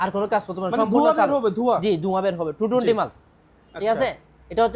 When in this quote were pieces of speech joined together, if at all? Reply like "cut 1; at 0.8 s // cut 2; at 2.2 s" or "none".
none